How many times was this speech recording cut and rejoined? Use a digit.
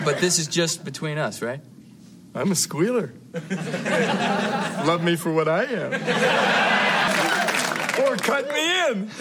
1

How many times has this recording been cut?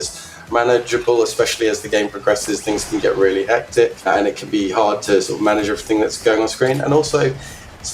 1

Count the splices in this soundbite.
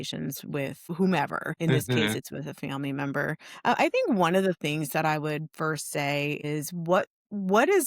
3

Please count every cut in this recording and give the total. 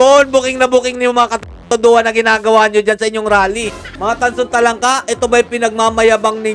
1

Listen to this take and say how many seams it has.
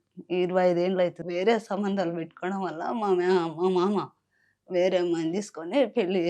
1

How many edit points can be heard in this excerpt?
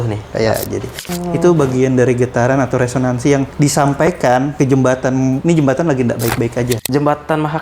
5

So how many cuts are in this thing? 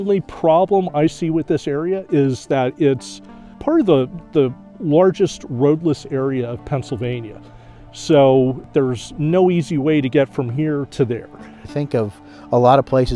3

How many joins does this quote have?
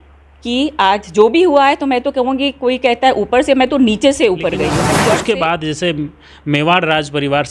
1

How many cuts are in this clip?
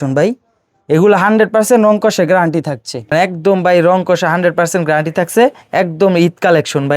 1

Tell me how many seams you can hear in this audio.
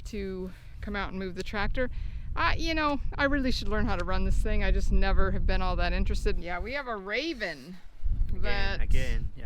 1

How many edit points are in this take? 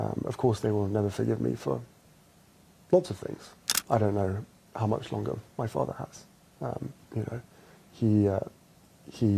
1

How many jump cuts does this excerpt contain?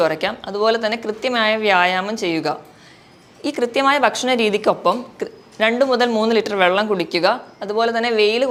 0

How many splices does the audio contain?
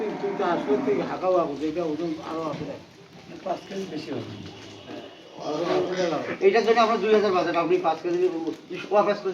0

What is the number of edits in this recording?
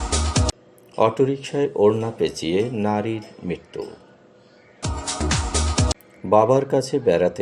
2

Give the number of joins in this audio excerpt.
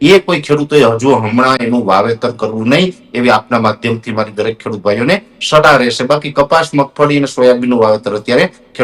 0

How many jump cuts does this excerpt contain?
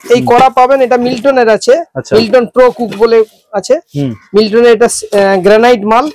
0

